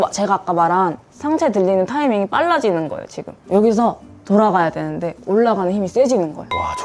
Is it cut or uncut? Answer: uncut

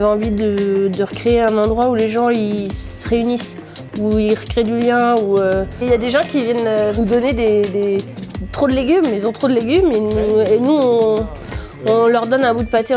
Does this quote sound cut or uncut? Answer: uncut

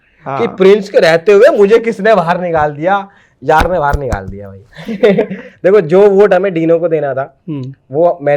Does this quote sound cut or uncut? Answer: uncut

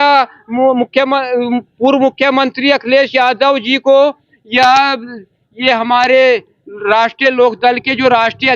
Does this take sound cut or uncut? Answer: uncut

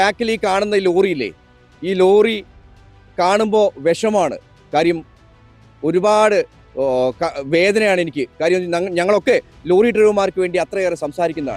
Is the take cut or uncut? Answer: uncut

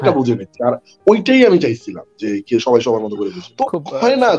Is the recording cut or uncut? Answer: cut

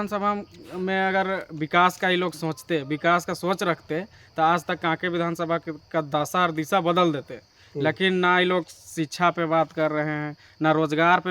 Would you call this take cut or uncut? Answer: uncut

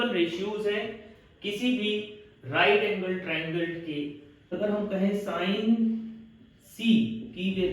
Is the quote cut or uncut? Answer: cut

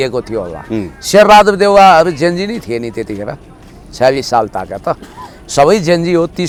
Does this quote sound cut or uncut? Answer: uncut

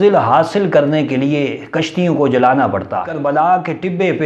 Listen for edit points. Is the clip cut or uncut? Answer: cut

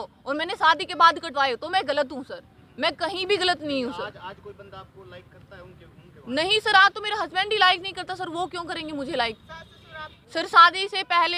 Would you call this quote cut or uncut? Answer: uncut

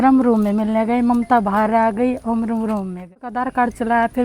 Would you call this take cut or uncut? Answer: cut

